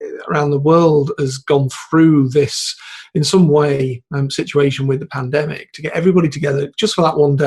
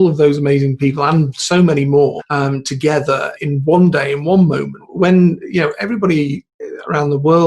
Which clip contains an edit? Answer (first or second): second